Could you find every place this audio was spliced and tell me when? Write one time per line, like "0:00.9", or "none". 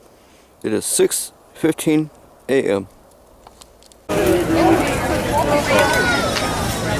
0:03.9